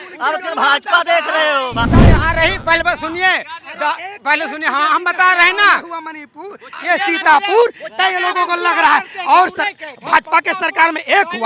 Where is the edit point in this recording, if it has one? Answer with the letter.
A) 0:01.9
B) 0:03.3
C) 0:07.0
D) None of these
A